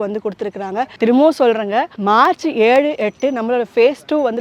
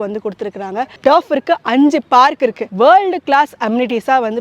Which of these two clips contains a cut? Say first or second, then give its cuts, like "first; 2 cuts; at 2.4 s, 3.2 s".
second; 2 cuts; at 0.9 s, 2.6 s